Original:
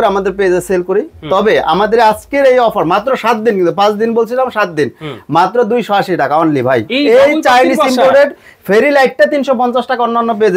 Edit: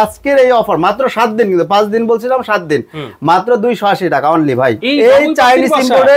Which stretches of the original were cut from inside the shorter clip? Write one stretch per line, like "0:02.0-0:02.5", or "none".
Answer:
none